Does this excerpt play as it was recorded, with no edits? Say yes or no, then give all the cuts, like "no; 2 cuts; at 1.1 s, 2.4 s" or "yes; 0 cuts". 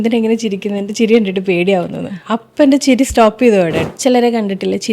no; 1 cut; at 3.9 s